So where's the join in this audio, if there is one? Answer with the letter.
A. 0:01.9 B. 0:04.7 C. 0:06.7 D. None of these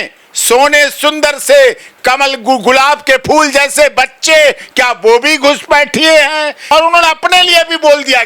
C